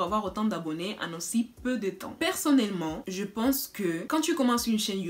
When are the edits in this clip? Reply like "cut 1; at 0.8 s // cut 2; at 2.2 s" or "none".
none